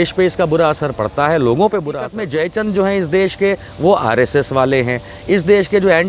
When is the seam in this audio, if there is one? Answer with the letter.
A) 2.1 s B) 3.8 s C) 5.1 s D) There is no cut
A